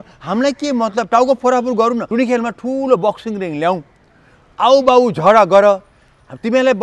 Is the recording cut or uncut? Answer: cut